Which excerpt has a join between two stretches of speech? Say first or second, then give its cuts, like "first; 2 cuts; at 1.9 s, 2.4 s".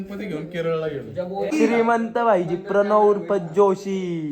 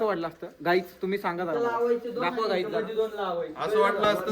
first; 1 cut; at 1.3 s